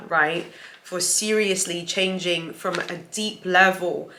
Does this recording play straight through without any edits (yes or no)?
yes